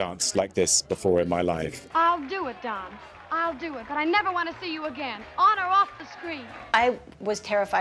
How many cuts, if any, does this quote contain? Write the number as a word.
two